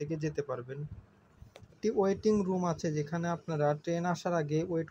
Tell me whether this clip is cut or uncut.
cut